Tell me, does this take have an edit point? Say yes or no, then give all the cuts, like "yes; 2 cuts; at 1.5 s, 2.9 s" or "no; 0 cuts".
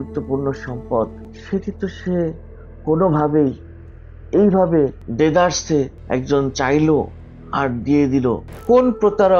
yes; 4 cuts; at 1.3 s, 5.0 s, 6.0 s, 8.5 s